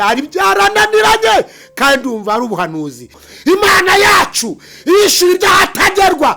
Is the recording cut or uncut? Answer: cut